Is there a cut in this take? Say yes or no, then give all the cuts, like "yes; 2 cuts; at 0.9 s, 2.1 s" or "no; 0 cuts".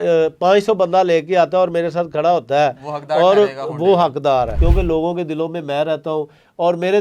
yes; 1 cut; at 4.5 s